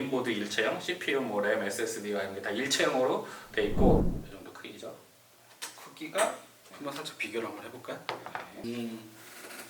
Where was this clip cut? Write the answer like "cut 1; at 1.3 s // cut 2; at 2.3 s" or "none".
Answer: cut 1; at 4.1 s // cut 2; at 8.6 s